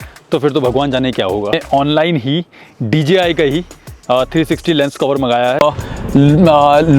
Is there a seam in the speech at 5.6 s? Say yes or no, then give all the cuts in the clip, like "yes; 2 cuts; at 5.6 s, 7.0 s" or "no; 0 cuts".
yes; 2 cuts; at 1.6 s, 5.6 s